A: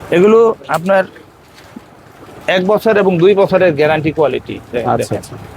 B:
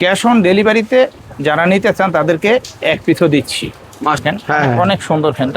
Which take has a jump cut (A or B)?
B